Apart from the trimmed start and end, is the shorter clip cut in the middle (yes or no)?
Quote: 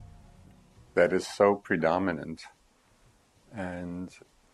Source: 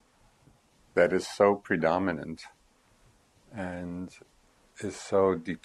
no